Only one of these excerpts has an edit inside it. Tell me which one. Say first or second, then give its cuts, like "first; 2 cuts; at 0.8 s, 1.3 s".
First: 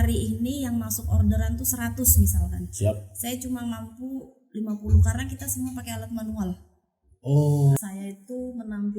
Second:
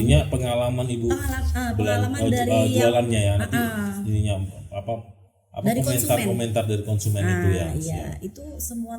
first; 1 cut; at 7.8 s